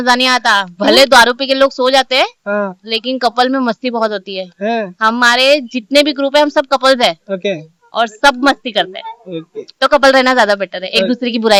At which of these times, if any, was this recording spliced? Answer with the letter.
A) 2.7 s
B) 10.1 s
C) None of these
C